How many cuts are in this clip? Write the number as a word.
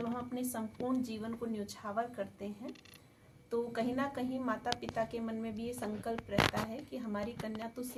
zero